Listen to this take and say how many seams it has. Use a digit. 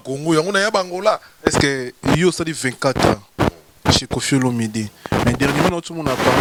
0